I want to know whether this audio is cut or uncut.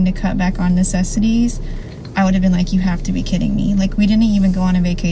uncut